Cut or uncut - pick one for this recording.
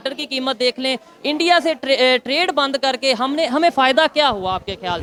uncut